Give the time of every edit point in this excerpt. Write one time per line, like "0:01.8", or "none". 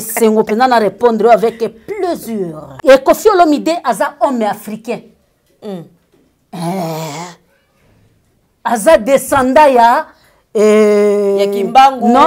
0:02.6